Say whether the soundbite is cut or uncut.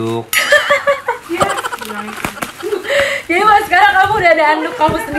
uncut